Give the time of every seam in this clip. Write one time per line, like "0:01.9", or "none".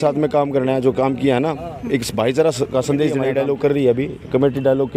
0:03.2